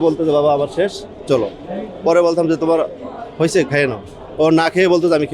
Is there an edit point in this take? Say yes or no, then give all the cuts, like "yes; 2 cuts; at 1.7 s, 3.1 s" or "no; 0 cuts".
no; 0 cuts